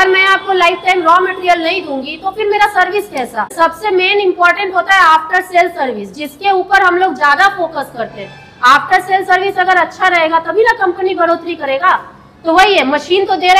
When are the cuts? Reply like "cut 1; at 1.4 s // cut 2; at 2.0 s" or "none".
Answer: cut 1; at 3.5 s